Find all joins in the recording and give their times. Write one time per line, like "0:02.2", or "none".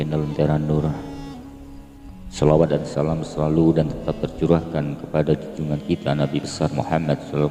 none